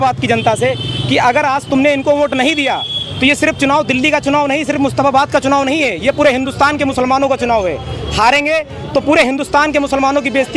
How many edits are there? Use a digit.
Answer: 0